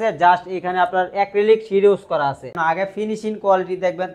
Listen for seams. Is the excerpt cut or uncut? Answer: cut